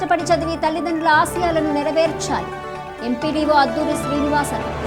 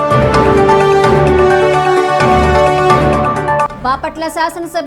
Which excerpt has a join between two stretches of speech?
second; 1 cut; at 0.9 s

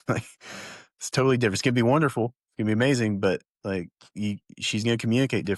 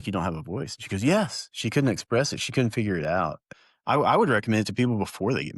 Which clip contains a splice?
second; 1 cut; at 3.5 s

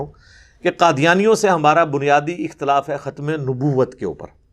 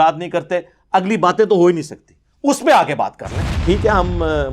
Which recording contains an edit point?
second; 1 cut; at 3.5 s

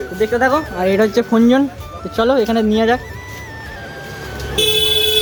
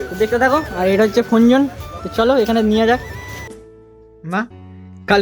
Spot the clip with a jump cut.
second; 1 cut; at 3.6 s

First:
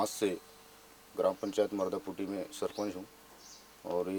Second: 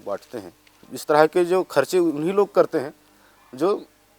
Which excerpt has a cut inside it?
second; 1 cut; at 0.9 s

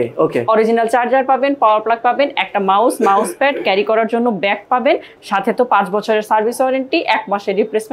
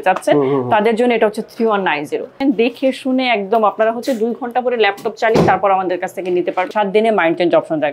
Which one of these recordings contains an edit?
second; 2 cuts; at 2.4 s, 6.7 s

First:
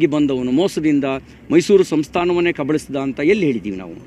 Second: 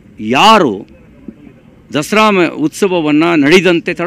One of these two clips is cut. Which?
first; 1 cut; at 3.1 s

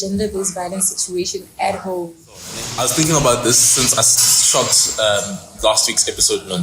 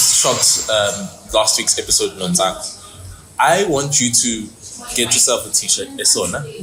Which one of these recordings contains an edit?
first; 1 cut; at 2.6 s

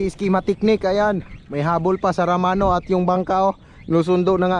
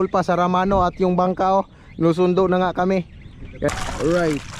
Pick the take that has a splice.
second; 1 cut; at 3.7 s

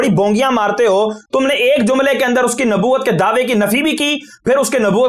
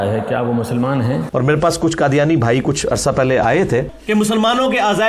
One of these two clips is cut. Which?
second; 2 cuts; at 1.2 s, 3.9 s

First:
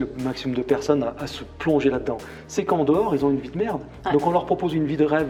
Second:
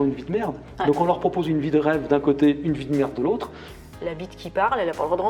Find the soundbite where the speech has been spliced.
second; 1 cut; at 3.9 s

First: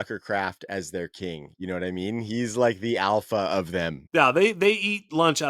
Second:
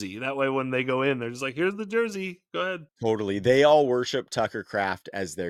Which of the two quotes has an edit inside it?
first; 1 cut; at 4.0 s

